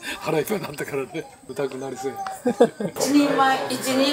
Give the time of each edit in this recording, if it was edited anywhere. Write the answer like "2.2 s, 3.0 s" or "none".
1.4 s, 3.0 s